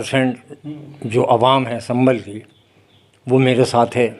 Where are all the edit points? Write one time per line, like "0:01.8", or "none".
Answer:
none